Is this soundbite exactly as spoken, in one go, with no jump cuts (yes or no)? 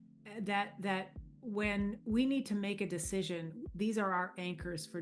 yes